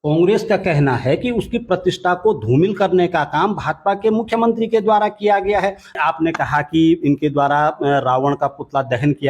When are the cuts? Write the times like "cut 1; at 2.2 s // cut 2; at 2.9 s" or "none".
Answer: cut 1; at 5.9 s